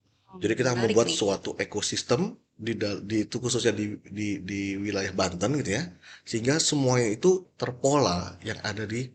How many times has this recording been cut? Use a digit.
1